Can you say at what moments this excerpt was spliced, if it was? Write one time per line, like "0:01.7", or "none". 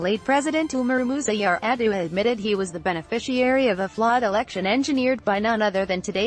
none